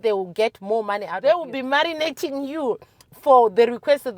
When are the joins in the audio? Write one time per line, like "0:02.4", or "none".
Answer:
0:01.1